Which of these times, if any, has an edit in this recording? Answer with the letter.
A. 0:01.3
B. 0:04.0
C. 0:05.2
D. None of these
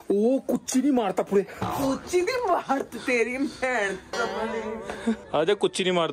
C